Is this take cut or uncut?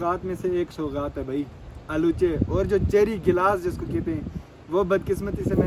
uncut